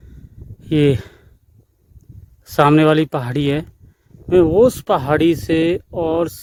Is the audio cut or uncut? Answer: uncut